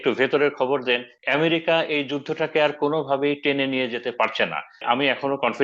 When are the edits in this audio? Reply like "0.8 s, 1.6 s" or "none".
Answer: 1.1 s, 4.8 s